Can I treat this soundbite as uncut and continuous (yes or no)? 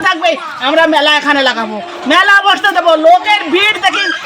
yes